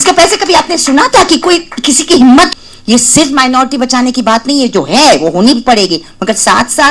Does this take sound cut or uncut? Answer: cut